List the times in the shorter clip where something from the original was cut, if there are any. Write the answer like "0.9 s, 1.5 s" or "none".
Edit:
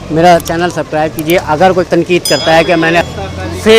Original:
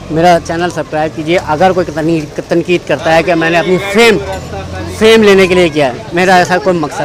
1.9 s, 3.1 s